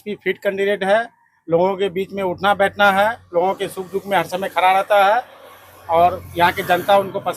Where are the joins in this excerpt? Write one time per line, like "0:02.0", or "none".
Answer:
none